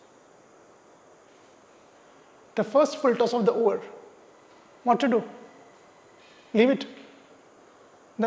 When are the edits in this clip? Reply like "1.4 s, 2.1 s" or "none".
none

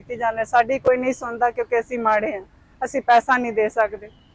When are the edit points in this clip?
none

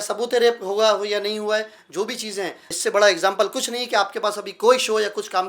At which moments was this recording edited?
2.6 s

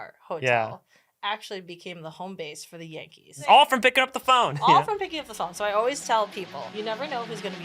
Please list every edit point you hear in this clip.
3.4 s, 6.7 s

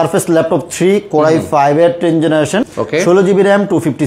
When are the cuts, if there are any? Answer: 2.7 s

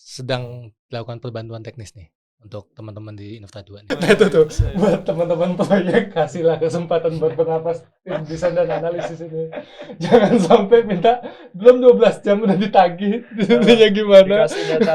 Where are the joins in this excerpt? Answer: 3.8 s

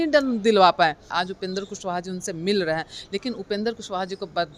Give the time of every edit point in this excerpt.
1.1 s

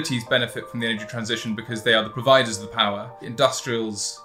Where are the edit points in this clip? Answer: 3.2 s

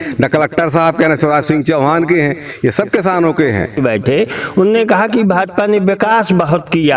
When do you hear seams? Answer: 3.8 s

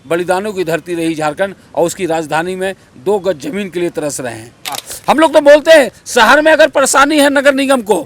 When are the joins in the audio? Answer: 4.9 s

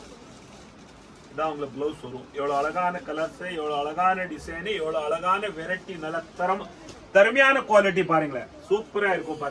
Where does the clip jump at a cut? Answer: none

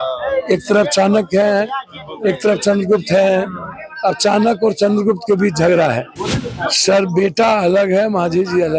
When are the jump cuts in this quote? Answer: 6.1 s

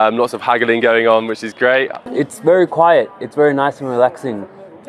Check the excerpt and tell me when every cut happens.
2.0 s

